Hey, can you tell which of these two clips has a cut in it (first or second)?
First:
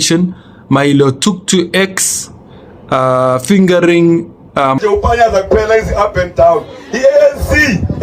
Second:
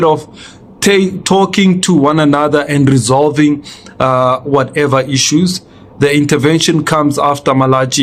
first